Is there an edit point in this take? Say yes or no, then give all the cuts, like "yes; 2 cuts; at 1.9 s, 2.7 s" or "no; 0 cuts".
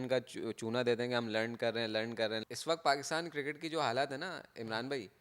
yes; 1 cut; at 2.4 s